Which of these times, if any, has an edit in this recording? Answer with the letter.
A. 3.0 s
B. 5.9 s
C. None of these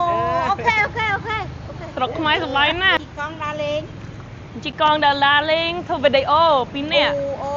A